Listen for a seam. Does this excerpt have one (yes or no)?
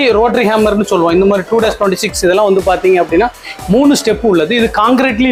no